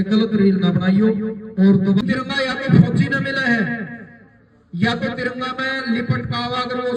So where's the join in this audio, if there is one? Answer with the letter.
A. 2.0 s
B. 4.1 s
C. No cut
A